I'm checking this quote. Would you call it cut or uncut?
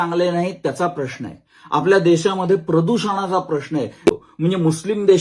cut